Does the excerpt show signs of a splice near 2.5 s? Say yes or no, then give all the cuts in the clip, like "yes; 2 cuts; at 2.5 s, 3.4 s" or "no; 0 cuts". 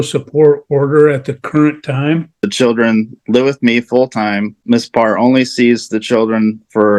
yes; 2 cuts; at 2.5 s, 4.6 s